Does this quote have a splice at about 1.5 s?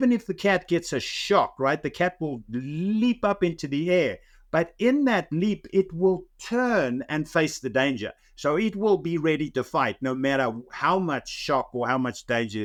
no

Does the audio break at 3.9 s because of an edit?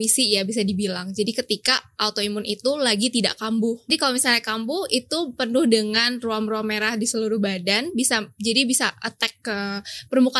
yes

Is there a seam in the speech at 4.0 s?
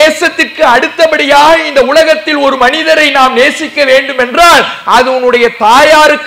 no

